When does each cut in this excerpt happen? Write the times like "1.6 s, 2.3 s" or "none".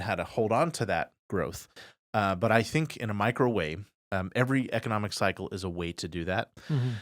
none